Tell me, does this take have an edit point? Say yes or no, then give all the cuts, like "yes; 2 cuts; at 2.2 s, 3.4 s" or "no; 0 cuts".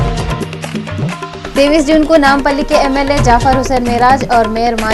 yes; 1 cut; at 1.3 s